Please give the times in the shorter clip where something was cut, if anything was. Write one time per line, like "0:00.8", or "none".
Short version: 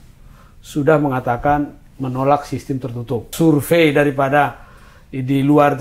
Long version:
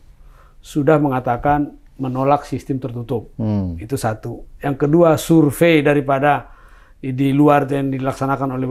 0:03.3